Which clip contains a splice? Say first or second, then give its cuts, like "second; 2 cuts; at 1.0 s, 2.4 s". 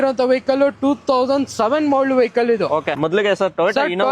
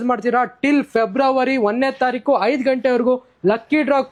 first; 1 cut; at 2.9 s